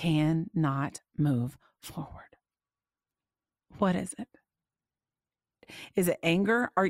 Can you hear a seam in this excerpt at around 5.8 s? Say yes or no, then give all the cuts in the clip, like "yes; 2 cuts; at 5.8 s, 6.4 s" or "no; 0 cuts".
yes; 1 cut; at 5.8 s